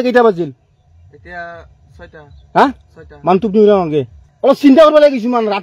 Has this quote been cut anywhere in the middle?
yes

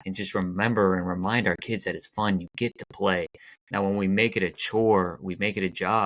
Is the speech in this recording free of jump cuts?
yes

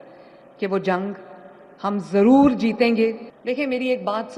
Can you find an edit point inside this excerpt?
yes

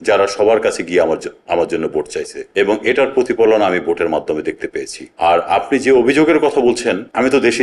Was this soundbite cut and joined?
no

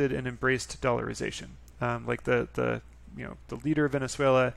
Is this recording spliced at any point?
no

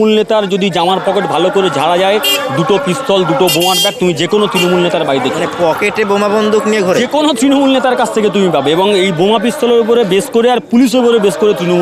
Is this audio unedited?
yes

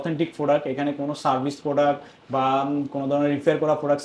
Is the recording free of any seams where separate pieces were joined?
yes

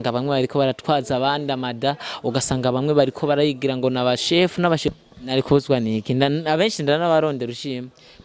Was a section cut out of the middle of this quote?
yes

